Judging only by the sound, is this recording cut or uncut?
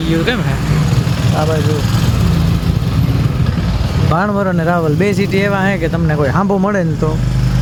uncut